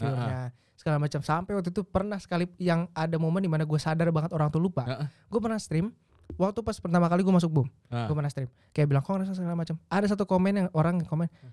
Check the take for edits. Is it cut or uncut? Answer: uncut